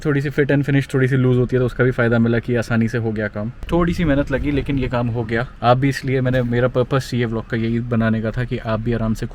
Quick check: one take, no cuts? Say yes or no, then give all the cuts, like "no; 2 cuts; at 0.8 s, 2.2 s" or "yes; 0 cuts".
yes; 0 cuts